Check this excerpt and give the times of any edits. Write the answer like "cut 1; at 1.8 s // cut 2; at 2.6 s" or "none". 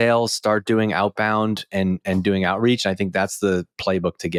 none